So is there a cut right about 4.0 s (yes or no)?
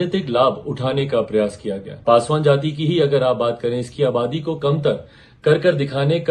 no